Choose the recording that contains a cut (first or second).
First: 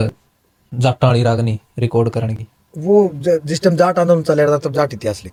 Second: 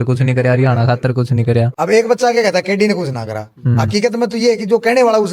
second